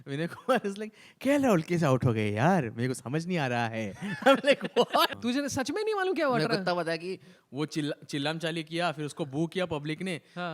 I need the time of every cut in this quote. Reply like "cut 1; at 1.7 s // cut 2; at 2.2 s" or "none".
cut 1; at 5.2 s